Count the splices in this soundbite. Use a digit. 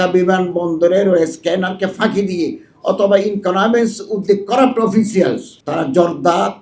1